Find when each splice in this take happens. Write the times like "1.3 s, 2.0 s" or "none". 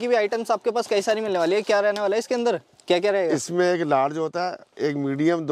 none